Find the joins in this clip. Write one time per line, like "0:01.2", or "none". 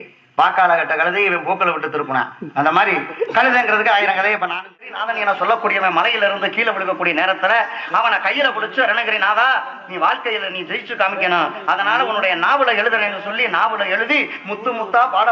0:04.9